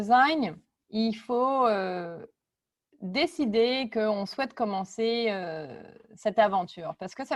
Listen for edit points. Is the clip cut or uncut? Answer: uncut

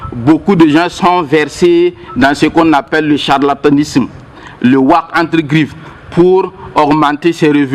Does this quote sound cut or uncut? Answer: uncut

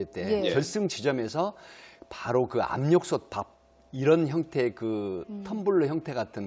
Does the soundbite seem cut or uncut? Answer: cut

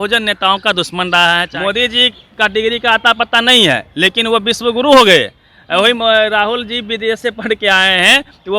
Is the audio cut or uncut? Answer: cut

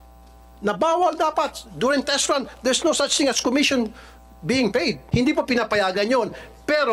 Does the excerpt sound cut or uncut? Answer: cut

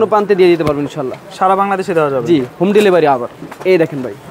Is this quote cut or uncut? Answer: uncut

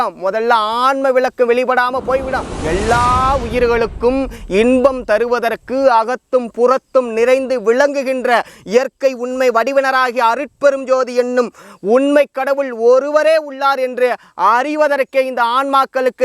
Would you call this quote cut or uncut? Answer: cut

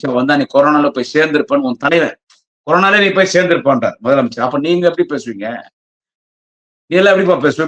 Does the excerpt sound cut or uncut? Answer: uncut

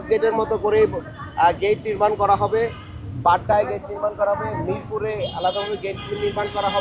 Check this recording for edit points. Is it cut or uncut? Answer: uncut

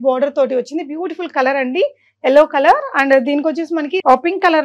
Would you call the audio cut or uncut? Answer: uncut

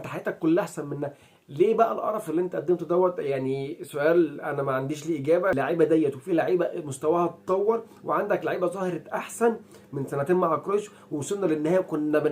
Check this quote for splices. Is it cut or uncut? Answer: cut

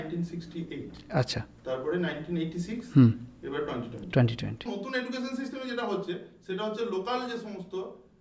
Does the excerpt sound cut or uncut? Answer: cut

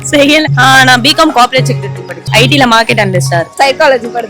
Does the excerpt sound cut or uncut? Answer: cut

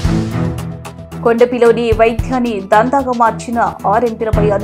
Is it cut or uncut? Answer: cut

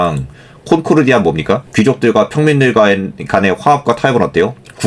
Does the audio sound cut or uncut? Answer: cut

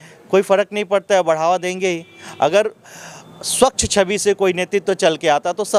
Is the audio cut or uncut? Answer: uncut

